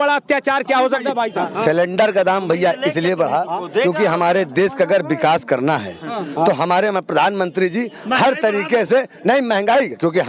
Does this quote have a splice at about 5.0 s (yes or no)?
no